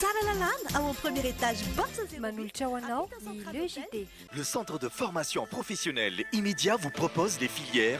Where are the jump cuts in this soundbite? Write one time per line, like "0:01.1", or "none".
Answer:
0:04.2